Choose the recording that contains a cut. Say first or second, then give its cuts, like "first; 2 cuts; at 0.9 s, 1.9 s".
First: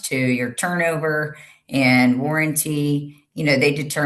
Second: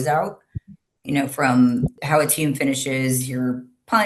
second; 1 cut; at 2.0 s